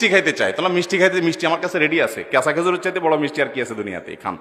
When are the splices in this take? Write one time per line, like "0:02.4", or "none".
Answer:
none